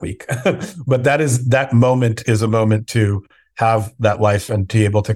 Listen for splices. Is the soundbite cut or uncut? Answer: uncut